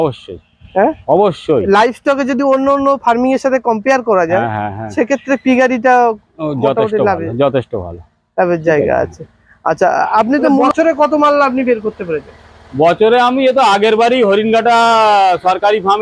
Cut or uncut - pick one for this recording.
cut